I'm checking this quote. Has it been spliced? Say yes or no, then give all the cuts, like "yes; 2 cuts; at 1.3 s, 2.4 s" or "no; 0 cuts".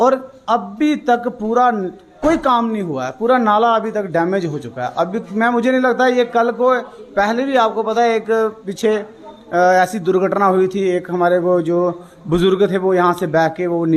no; 0 cuts